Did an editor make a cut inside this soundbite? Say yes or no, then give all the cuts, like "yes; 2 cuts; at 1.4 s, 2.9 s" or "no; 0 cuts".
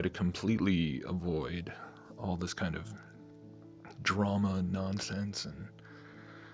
no; 0 cuts